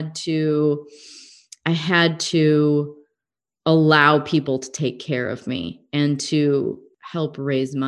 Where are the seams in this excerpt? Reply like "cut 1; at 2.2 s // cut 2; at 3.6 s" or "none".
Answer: cut 1; at 6.9 s